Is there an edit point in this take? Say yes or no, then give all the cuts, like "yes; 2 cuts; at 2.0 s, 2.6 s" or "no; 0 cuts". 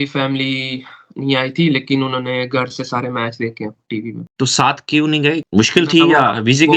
no; 0 cuts